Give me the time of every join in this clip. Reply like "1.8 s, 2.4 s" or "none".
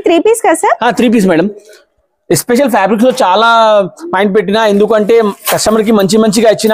none